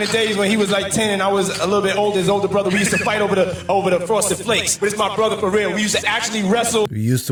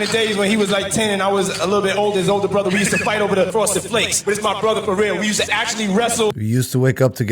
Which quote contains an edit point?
second; 1 cut; at 3.5 s

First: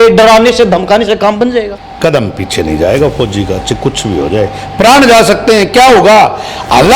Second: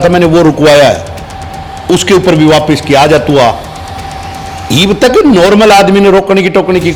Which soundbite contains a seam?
first; 1 cut; at 1.8 s

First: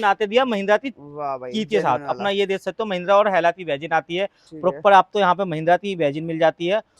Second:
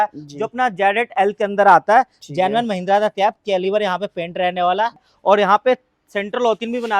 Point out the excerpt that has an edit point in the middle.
second; 1 cut; at 5.1 s

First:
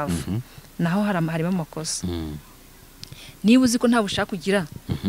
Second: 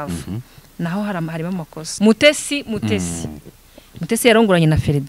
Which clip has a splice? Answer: second; 1 cut; at 1.8 s

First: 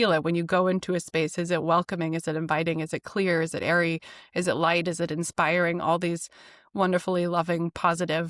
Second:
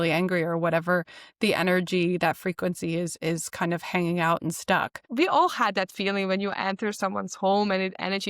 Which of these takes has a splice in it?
second; 1 cut; at 5.0 s

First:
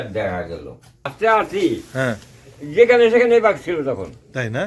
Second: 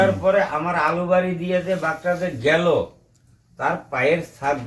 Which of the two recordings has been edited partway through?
first; 1 cut; at 1.1 s

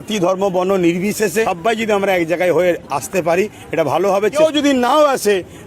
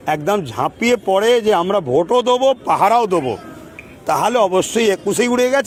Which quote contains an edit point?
first; 2 cuts; at 1.5 s, 4.3 s

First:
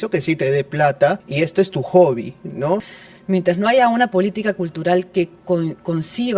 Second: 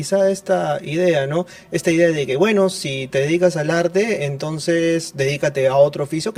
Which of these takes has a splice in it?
first; 2 cuts; at 1.2 s, 3.0 s

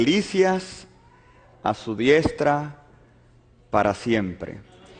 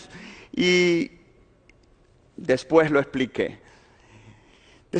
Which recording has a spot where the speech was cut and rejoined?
second; 1 cut; at 3.4 s

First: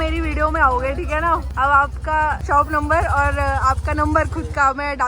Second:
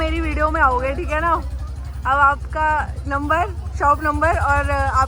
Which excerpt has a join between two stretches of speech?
first; 2 cuts; at 1.5 s, 2.4 s

